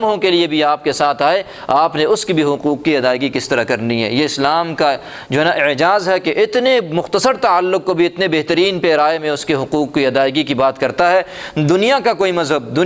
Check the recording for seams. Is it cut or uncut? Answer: uncut